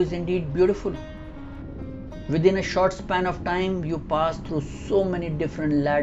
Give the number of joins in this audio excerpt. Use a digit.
1